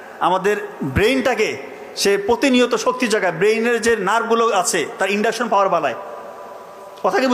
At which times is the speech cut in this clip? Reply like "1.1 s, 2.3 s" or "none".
none